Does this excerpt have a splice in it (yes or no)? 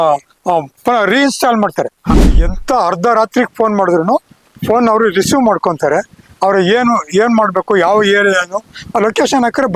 yes